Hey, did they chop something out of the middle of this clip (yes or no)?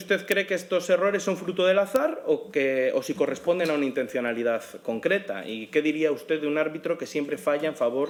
no